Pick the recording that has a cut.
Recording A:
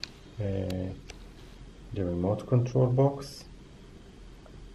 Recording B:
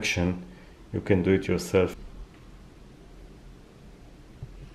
B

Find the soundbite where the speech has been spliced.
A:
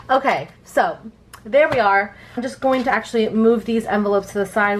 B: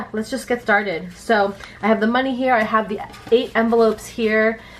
A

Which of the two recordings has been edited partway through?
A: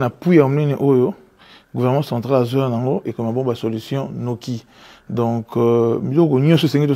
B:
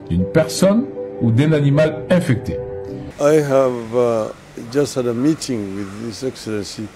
B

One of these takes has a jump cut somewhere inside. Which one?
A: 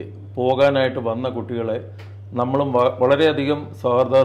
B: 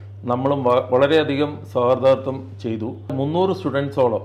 B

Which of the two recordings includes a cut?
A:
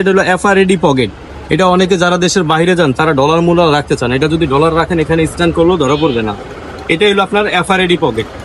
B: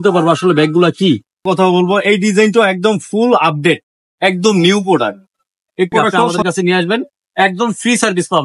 B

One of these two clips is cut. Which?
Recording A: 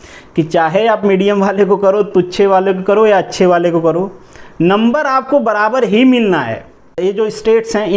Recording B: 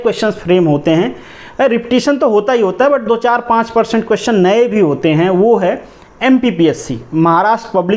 A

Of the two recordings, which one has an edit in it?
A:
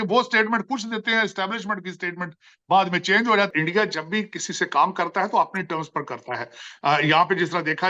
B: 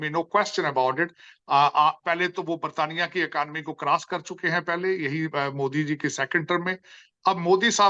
A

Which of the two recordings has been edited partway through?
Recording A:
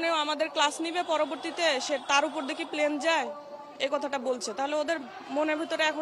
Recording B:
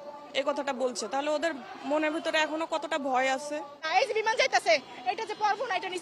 B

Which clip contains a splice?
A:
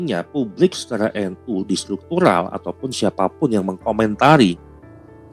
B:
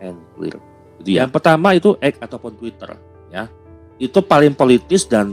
B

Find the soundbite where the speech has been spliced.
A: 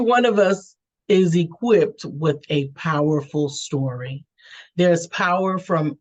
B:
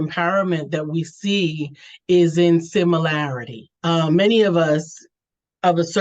B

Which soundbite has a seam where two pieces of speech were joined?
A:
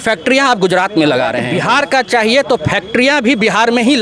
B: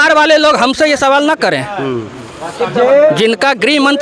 A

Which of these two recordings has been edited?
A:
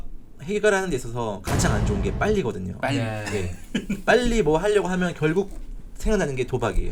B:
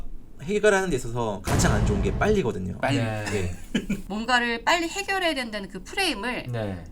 B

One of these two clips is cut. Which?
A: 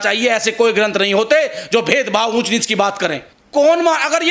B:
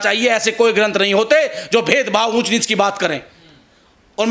A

